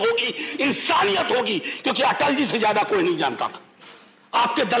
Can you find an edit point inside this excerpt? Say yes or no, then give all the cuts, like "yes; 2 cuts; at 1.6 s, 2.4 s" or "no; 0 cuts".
no; 0 cuts